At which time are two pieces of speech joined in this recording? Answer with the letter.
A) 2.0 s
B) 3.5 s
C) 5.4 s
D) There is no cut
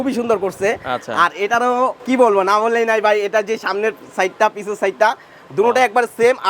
A